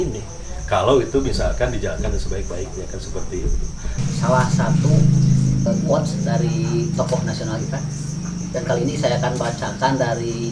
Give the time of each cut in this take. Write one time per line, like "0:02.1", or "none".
0:04.0
0:05.7